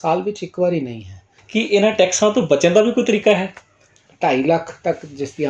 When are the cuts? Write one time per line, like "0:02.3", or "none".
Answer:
0:01.4
0:04.0

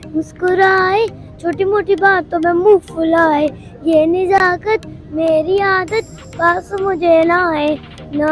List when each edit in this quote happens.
none

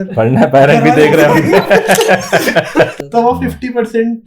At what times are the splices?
0:02.9

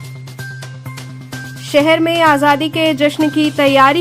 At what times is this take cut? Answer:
0:01.1

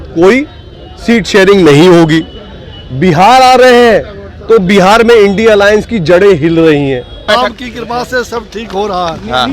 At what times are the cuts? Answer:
0:07.2

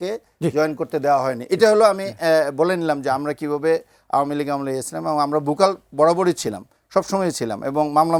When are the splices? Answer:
none

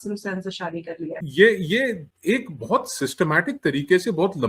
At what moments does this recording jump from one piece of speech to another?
0:01.2

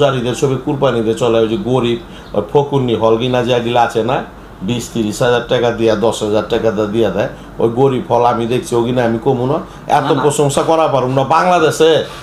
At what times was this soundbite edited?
none

